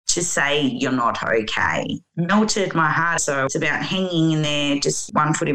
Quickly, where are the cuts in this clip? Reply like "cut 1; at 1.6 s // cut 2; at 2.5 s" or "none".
cut 1; at 2.0 s